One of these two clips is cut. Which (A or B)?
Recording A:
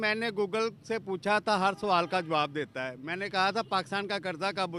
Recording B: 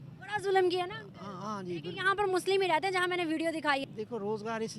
B